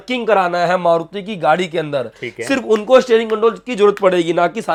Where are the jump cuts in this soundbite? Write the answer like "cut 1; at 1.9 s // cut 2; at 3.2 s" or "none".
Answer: none